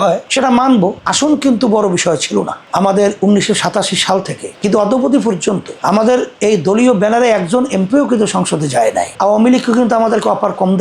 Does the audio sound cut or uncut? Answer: cut